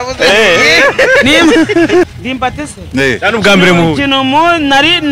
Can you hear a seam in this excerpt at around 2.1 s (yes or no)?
yes